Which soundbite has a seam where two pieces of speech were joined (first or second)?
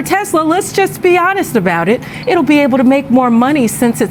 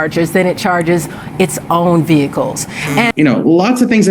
second